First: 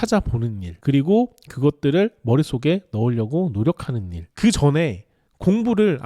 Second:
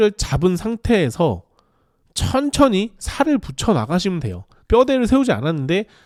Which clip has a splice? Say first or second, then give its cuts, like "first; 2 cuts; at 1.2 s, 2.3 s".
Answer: first; 1 cut; at 4.2 s